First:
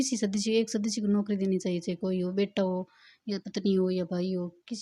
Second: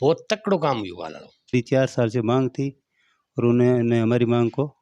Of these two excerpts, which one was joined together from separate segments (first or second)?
second